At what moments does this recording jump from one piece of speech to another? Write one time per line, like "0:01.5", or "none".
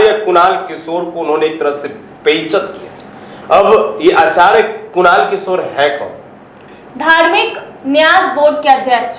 none